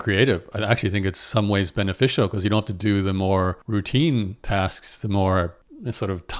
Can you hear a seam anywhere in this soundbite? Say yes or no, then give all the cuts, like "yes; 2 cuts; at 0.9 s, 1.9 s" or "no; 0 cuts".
no; 0 cuts